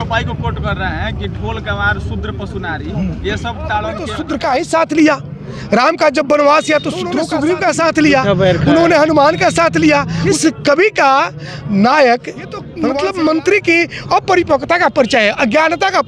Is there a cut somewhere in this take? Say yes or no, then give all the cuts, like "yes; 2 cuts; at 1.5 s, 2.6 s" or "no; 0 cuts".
yes; 4 cuts; at 4.2 s, 7.2 s, 10.2 s, 12.6 s